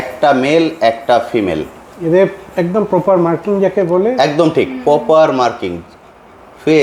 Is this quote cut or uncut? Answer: uncut